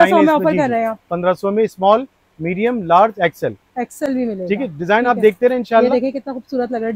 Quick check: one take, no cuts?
yes; 0 cuts

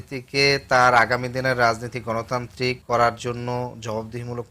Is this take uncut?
no; 1 cut; at 2.8 s

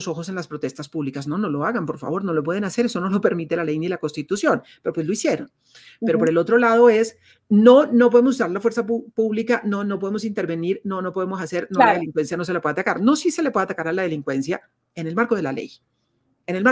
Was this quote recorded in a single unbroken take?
yes; 0 cuts

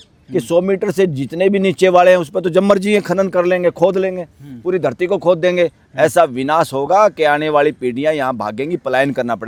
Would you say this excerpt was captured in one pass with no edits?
yes; 0 cuts

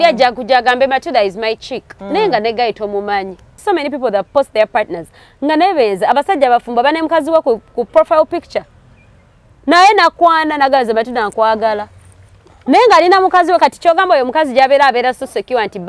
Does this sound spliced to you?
yes; 1 cut; at 3.6 s

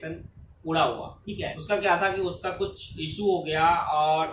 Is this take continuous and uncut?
no; 1 cut; at 1.6 s

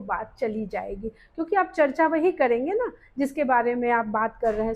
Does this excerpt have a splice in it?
no; 0 cuts

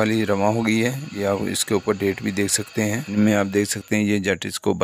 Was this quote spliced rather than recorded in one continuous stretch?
yes; 2 cuts; at 1.1 s, 3.1 s

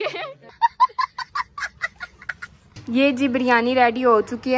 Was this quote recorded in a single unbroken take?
no; 1 cut; at 2.7 s

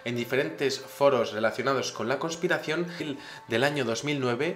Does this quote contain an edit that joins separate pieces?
no; 0 cuts

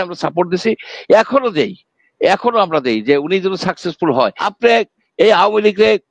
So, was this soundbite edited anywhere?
yes; 1 cut; at 4.4 s

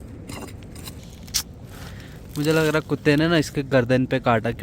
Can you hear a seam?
yes; 1 cut; at 1.0 s

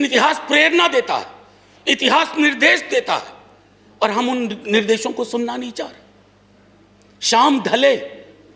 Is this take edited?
no; 0 cuts

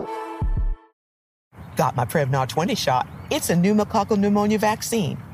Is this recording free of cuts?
no; 1 cut; at 1.0 s

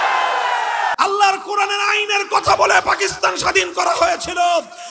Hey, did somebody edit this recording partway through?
yes; 1 cut; at 0.9 s

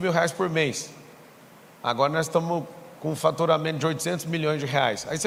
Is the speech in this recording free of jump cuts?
yes; 0 cuts

